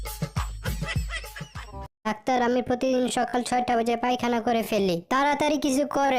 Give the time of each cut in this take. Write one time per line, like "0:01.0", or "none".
0:02.1